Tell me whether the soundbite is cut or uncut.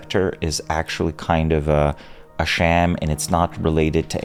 uncut